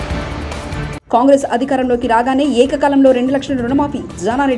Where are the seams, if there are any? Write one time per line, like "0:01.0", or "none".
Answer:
none